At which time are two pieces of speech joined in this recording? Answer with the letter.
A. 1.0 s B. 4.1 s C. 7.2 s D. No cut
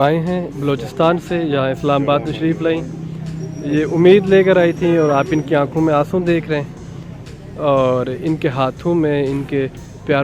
D